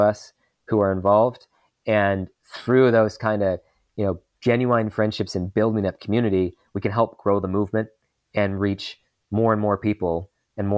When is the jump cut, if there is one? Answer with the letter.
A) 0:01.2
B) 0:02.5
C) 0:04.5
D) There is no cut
D